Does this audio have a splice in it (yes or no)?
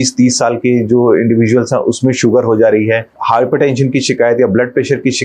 yes